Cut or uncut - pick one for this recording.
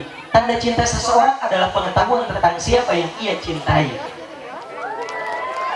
uncut